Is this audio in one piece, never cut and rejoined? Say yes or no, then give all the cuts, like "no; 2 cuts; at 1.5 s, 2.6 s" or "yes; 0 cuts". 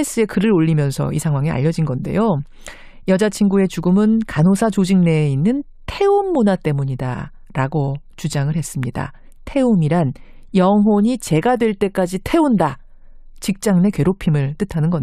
yes; 0 cuts